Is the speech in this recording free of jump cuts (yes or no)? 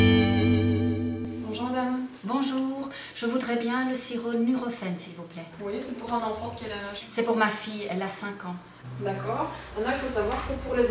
no